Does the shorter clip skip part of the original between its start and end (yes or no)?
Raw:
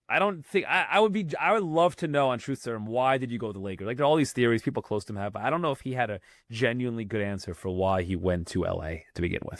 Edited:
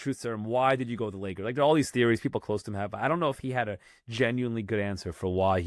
no